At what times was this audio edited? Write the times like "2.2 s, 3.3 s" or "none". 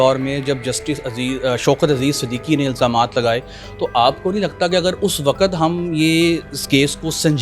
none